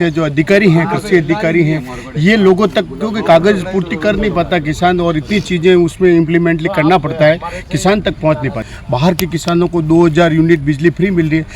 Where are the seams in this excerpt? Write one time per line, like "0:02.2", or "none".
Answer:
0:08.7